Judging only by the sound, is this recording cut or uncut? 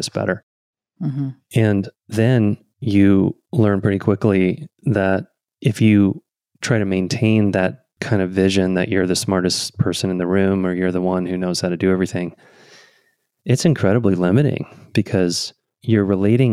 uncut